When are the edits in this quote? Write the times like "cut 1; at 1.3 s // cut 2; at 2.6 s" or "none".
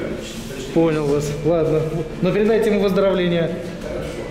none